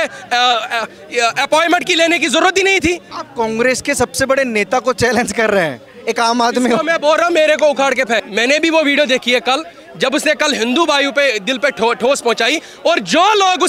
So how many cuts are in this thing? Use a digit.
2